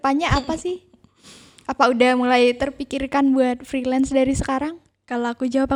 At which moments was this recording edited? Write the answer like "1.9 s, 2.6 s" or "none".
none